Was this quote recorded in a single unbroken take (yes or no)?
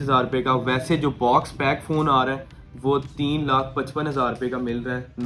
yes